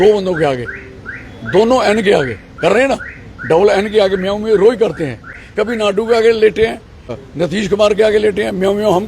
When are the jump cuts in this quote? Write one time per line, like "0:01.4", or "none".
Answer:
0:05.5
0:07.2